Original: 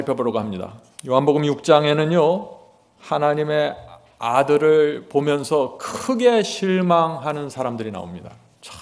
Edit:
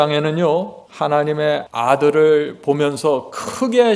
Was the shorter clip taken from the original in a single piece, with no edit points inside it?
no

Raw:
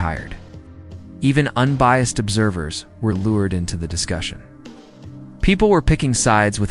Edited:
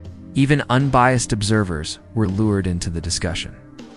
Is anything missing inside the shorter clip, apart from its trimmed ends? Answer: no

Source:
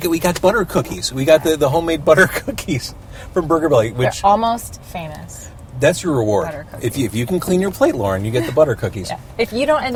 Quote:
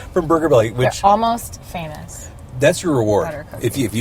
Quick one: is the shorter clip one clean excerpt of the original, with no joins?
yes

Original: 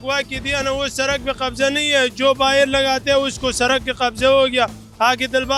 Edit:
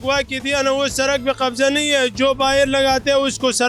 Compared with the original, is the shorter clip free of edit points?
yes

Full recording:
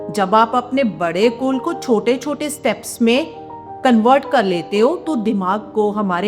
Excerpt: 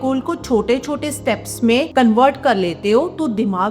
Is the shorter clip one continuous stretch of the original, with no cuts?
no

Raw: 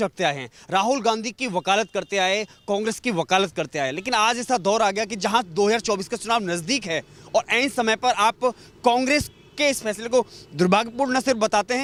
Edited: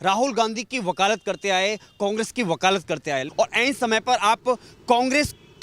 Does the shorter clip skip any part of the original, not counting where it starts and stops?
yes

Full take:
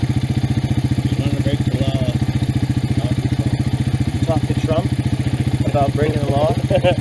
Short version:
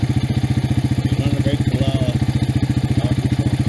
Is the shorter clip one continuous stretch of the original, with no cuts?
yes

